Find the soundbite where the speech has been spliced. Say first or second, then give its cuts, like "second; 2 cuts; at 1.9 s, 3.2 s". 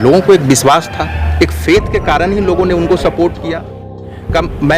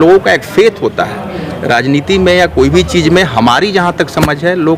first; 1 cut; at 3.8 s